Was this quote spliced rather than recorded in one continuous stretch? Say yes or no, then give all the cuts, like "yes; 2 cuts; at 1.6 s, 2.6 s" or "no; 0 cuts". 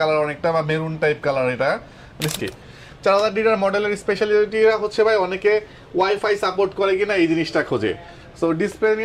yes; 1 cut; at 2.3 s